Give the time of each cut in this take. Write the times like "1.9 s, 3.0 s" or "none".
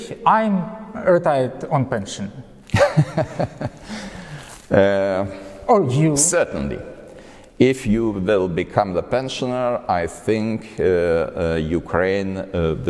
none